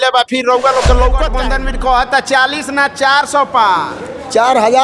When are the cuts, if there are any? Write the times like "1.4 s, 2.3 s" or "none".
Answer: 1.4 s